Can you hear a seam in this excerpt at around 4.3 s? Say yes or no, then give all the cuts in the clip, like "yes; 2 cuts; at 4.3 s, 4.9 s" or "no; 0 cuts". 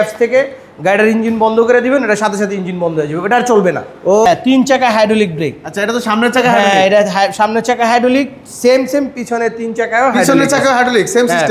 yes; 1 cut; at 4.3 s